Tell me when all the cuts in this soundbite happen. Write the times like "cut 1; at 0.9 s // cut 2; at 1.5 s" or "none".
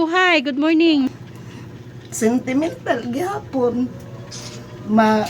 cut 1; at 1.1 s